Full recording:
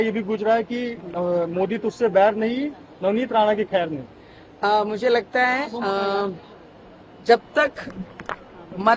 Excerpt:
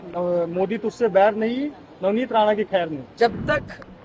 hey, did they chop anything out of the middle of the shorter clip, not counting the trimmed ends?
yes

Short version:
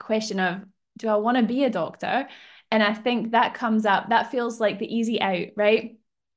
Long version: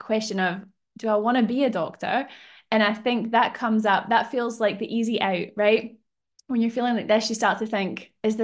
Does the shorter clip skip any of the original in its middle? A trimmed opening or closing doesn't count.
no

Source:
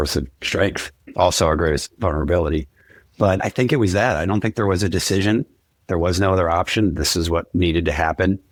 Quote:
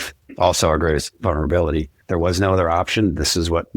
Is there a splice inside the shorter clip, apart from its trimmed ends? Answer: yes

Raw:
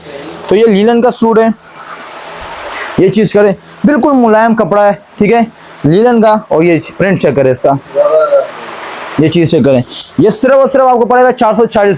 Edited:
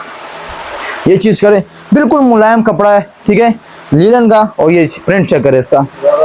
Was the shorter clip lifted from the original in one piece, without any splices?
yes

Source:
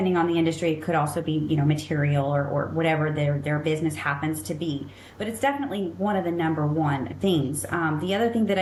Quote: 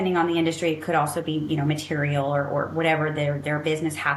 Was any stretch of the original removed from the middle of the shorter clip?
no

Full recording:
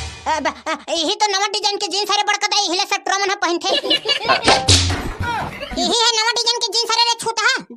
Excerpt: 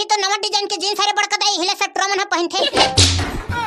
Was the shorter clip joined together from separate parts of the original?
yes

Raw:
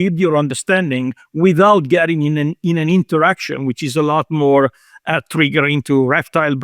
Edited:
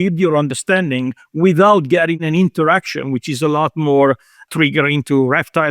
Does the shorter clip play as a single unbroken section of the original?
no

